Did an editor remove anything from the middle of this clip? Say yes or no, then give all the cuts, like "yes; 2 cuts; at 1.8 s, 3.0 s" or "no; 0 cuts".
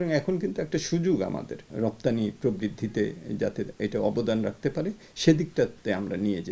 yes; 1 cut; at 1.6 s